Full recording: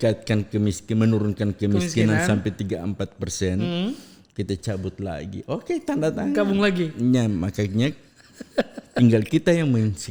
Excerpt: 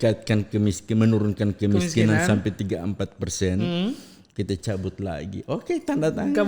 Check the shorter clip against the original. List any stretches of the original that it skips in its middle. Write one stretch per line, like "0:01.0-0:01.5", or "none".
none